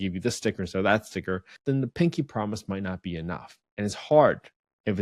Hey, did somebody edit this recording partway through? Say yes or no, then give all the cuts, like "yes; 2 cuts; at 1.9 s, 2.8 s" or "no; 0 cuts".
yes; 1 cut; at 1.5 s